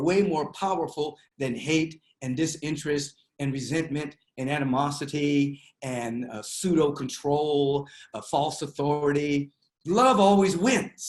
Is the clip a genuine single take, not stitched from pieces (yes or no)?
yes